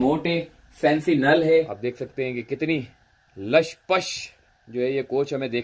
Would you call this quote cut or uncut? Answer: cut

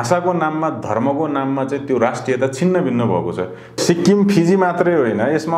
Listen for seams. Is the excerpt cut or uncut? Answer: cut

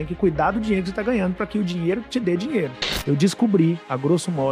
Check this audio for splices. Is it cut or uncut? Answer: cut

